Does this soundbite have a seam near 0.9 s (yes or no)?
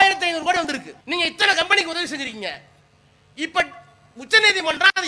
yes